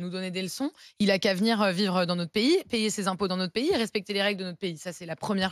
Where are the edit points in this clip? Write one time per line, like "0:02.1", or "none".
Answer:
none